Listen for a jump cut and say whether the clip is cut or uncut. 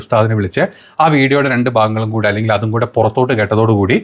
uncut